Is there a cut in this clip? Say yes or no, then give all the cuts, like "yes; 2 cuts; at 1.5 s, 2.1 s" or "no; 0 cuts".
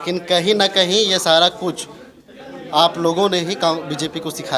no; 0 cuts